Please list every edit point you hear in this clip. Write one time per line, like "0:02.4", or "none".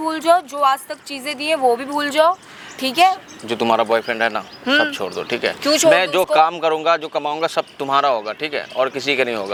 none